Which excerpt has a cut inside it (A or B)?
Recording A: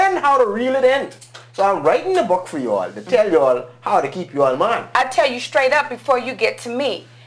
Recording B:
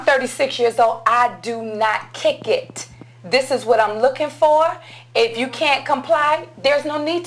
A